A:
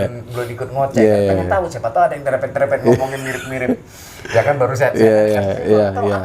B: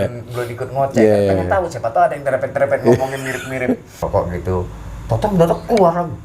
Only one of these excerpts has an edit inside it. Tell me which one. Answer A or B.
B